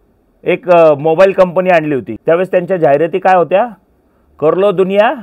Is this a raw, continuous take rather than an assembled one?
no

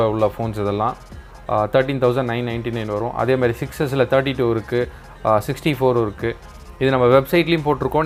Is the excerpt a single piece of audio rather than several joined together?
yes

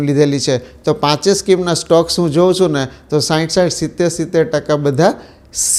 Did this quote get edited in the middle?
no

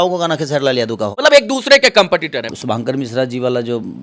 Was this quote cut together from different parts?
yes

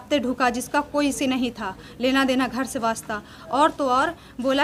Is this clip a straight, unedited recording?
yes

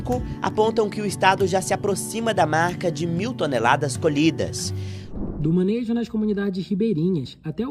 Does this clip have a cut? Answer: yes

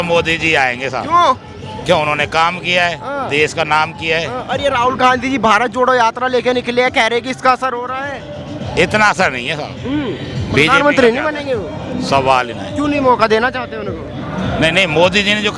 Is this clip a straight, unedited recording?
yes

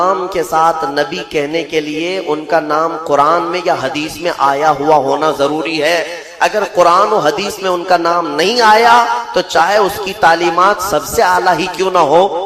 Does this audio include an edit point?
no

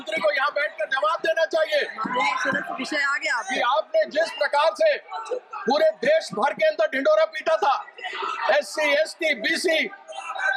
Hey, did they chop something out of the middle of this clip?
no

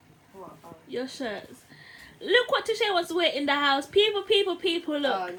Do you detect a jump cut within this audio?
no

